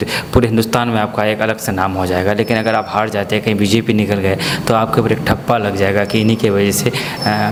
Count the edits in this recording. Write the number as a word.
zero